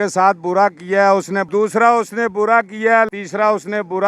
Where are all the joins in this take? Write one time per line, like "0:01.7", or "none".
0:01.5
0:03.1